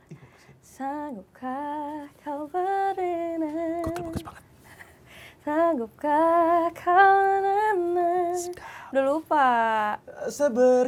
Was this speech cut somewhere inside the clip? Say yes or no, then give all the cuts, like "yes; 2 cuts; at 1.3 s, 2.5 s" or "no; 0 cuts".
no; 0 cuts